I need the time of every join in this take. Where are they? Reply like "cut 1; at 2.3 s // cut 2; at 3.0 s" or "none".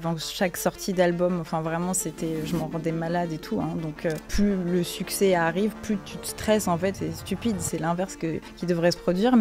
cut 1; at 4.2 s // cut 2; at 6.9 s // cut 3; at 8.5 s